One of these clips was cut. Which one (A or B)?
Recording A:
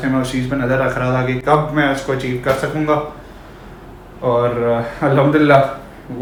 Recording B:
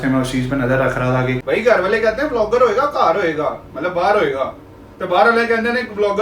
B